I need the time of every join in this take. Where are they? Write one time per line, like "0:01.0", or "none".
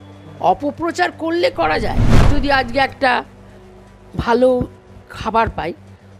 0:02.1